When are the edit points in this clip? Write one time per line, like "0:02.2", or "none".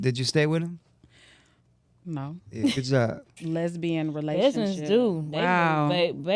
0:03.3